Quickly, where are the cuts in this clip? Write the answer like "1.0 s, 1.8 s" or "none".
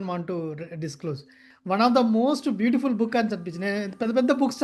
1.5 s